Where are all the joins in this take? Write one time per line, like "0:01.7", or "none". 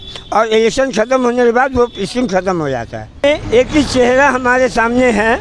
0:03.2